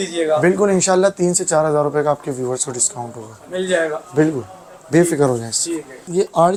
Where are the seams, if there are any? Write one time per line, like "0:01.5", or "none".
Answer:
none